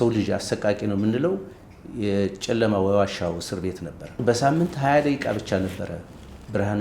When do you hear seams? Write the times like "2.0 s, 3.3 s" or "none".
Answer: 4.2 s